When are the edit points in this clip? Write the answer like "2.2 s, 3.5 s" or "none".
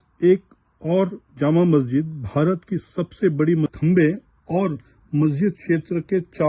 3.7 s

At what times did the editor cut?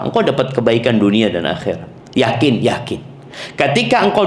1.9 s

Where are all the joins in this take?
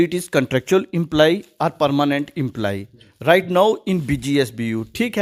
none

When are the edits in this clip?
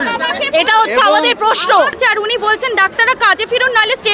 2.0 s

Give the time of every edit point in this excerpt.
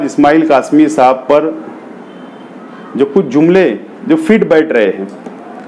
none

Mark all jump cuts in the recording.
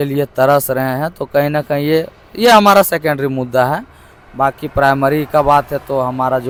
none

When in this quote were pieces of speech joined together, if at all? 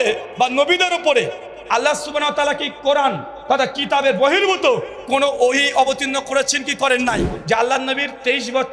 7.3 s

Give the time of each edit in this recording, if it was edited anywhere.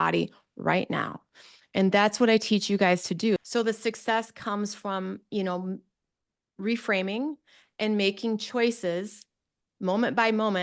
3.4 s

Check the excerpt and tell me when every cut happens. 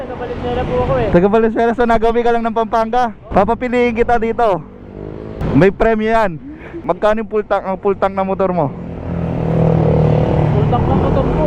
3.2 s, 5.4 s, 6.7 s

